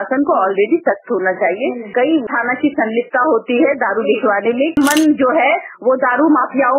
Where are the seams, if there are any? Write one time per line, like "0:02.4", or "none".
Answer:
0:01.9
0:04.8